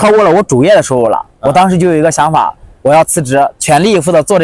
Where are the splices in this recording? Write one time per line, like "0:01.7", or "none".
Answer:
none